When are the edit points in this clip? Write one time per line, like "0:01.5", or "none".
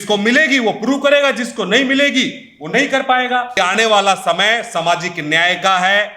0:03.6